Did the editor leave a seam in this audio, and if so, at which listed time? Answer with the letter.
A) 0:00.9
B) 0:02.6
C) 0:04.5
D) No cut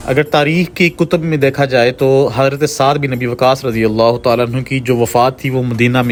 D